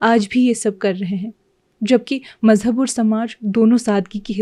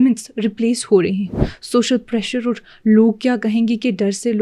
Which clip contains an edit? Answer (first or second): second